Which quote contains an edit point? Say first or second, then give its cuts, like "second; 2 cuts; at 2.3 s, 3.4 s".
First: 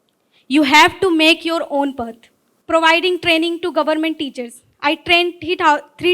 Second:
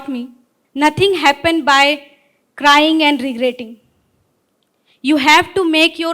first; 1 cut; at 2.5 s